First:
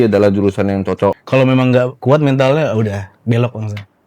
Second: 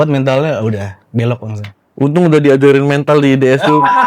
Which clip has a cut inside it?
first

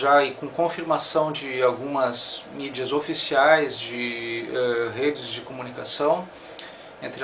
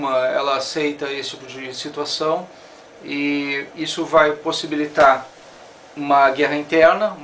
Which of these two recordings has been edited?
second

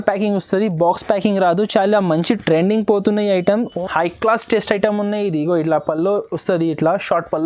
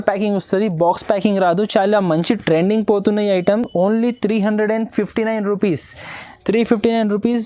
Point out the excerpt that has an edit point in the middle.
first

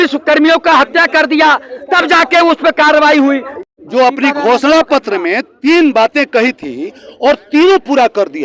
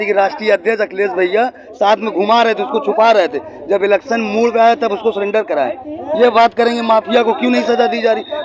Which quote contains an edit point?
first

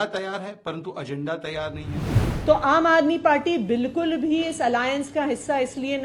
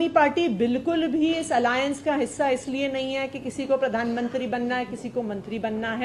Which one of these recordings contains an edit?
first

